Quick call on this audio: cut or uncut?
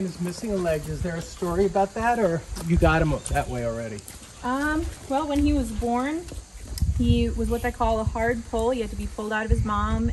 uncut